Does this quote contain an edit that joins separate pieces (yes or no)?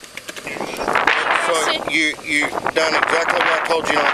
no